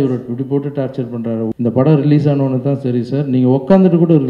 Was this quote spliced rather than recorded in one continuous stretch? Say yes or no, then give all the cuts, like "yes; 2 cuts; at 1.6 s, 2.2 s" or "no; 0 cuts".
yes; 1 cut; at 1.5 s